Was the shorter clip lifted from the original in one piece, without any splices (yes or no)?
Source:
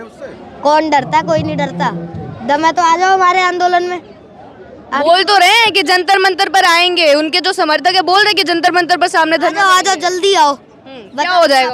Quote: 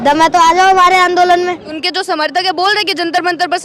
no